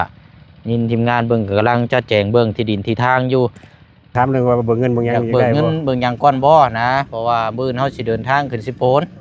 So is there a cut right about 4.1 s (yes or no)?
yes